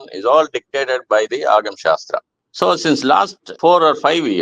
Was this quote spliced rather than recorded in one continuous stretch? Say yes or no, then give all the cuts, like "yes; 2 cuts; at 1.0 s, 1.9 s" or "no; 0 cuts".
yes; 2 cuts; at 2.3 s, 3.4 s